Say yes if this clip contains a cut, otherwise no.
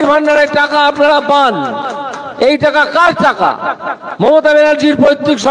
no